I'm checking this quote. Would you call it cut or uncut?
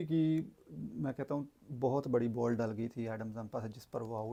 uncut